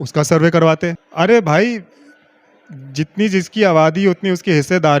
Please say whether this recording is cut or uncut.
cut